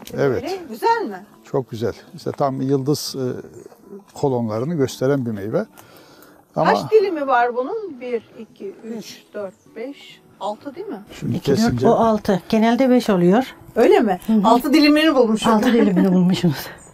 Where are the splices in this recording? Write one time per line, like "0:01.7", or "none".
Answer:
none